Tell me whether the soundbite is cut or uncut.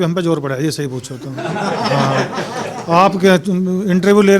uncut